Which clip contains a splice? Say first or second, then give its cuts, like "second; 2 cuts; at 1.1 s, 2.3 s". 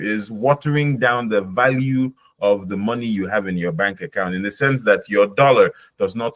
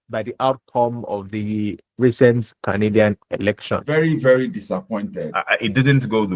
second; 2 cuts; at 3.9 s, 5.3 s